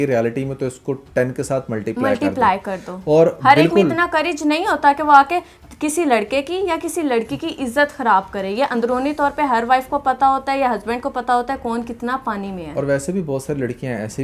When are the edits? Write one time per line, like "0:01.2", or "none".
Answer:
none